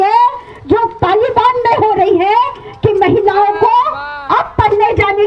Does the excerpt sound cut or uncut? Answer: uncut